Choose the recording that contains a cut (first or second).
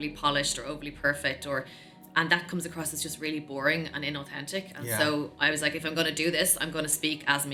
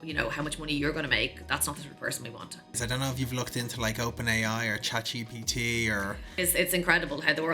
second